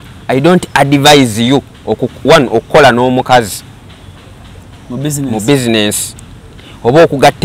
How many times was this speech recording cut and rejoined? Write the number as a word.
zero